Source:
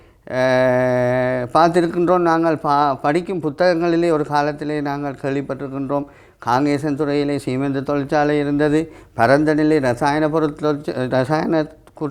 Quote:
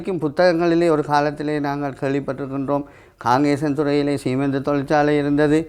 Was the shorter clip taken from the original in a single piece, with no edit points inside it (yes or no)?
yes